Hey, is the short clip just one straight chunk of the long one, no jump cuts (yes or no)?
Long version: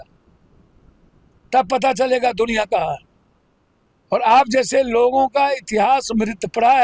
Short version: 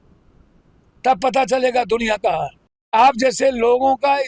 no